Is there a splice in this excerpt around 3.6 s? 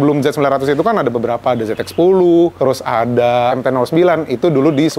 yes; 2 cuts; at 2.5 s, 3.6 s

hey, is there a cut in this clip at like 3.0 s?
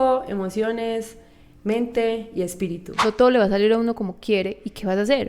yes; 1 cut; at 3.0 s

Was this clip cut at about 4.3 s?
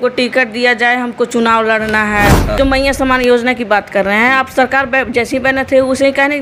no; 1 cut; at 2.6 s

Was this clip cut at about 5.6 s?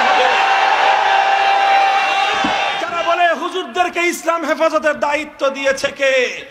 no; 1 cut; at 2.8 s

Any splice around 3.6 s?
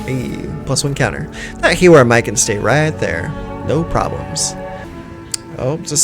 no; 1 cut; at 4.8 s

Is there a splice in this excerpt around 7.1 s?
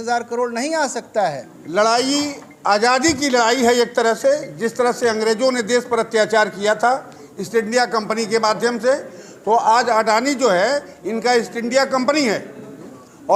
no; 1 cut; at 1.5 s

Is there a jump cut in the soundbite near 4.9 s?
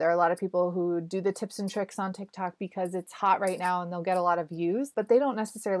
yes; 1 cut; at 4.9 s

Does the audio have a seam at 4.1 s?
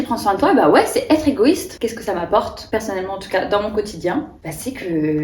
no; 2 cuts; at 1.7 s, 2.6 s

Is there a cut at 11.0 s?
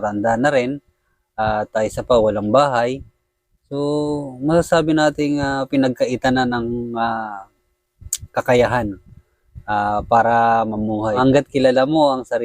yes; 1 cut; at 11.0 s

